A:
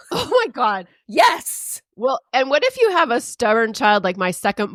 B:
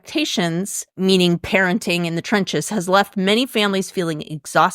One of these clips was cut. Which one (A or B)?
B